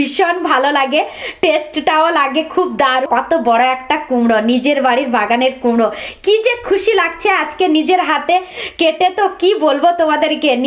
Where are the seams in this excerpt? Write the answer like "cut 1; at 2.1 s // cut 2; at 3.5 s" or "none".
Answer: cut 1; at 3.0 s